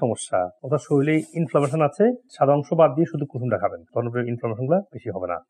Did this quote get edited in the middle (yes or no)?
no